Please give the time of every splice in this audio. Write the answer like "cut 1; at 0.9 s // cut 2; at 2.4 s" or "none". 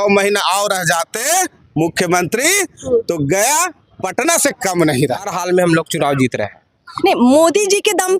cut 1; at 5.3 s